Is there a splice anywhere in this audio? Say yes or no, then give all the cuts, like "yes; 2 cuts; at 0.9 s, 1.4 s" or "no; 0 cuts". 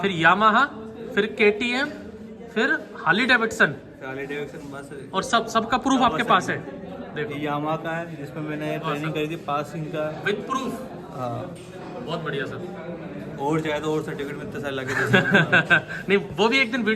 no; 0 cuts